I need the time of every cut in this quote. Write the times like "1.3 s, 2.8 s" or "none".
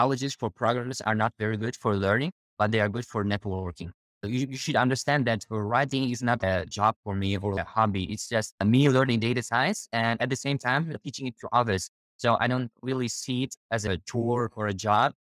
4.2 s, 6.4 s, 7.6 s